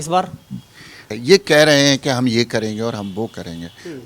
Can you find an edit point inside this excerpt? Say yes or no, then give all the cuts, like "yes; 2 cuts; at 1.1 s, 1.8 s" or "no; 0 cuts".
yes; 1 cut; at 1.1 s